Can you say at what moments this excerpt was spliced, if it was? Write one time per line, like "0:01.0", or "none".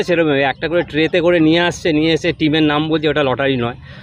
none